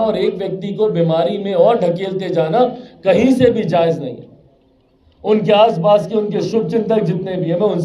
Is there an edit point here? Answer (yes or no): no